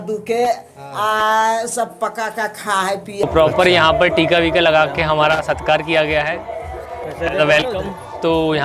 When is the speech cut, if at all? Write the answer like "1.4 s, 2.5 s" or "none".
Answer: 3.2 s